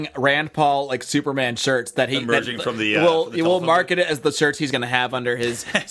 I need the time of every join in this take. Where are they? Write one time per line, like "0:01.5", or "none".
none